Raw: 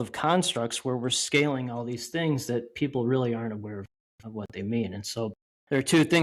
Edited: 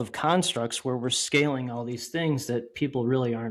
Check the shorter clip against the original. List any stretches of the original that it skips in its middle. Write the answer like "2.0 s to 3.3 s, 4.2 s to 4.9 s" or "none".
none